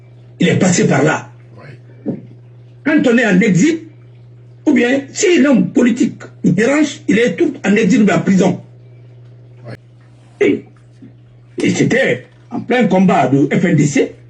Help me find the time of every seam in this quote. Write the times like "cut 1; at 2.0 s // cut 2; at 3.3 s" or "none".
cut 1; at 9.8 s